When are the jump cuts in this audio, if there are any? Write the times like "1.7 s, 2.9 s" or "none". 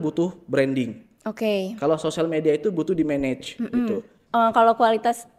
4.1 s